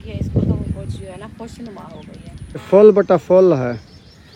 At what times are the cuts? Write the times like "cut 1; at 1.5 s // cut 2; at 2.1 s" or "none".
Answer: cut 1; at 2.6 s